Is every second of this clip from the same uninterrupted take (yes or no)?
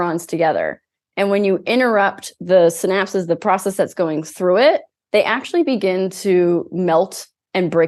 yes